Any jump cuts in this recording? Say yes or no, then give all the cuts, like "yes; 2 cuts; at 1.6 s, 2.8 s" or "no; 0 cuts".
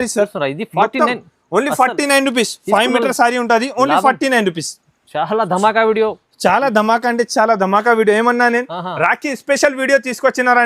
no; 0 cuts